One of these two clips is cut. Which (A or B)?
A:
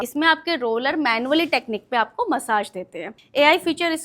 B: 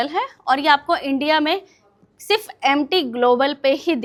A